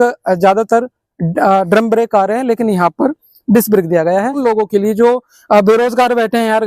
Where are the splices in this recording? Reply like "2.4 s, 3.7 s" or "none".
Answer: 4.4 s